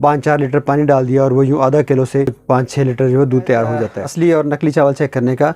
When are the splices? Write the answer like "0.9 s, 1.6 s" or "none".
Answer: 4.1 s